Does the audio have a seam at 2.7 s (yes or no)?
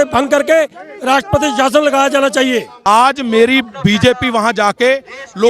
yes